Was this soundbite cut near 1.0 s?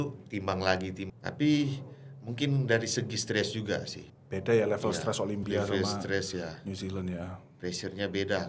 yes; 1 cut; at 1.0 s

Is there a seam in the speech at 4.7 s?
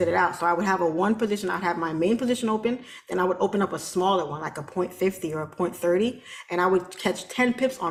no; 0 cuts

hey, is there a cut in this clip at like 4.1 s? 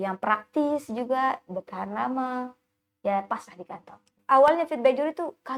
yes; 1 cut; at 4.1 s

